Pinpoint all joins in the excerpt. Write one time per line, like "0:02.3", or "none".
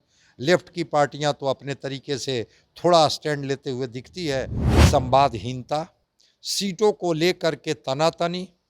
0:04.6

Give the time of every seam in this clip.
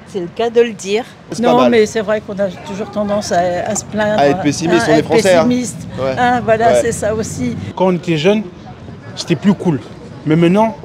0:01.4
0:07.6

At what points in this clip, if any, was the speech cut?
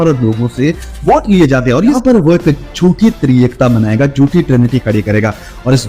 0:01.9

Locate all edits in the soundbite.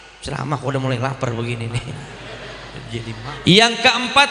0:03.2

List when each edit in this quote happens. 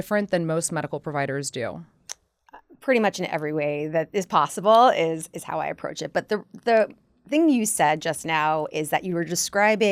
none

